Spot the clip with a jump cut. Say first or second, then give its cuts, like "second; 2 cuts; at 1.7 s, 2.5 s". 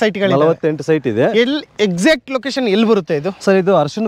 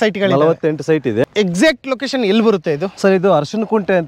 second; 1 cut; at 1.2 s